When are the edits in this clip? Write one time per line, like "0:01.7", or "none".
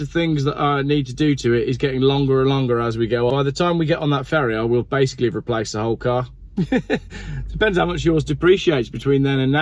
0:03.3
0:06.4